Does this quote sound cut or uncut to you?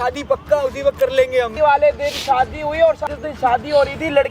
cut